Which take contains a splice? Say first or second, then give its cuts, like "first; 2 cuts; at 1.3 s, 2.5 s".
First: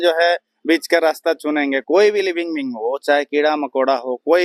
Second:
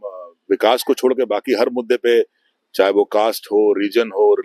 first; 1 cut; at 1.8 s